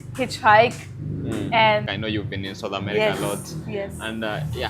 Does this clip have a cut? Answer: yes; 1 cut; at 1.9 s

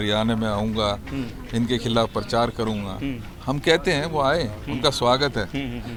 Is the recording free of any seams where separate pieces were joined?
yes; 0 cuts

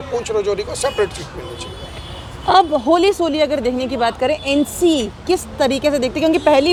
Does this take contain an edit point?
no; 0 cuts

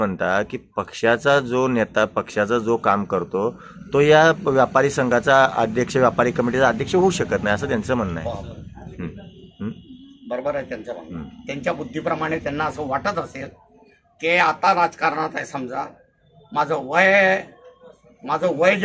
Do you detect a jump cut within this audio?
no; 0 cuts

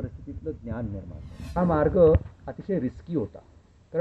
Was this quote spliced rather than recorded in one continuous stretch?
yes; 1 cut; at 1.5 s

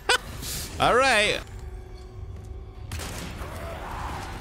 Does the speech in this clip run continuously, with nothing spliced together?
no; 1 cut; at 1.4 s

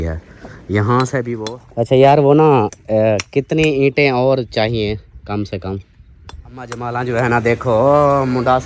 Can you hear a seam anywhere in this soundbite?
yes; 2 cuts; at 1.3 s, 6.7 s

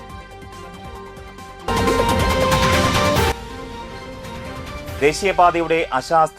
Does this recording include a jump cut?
no; 0 cuts

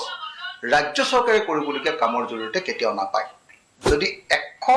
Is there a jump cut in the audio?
yes; 1 cut; at 3.7 s

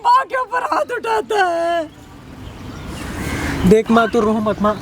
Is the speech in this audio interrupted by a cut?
no; 0 cuts

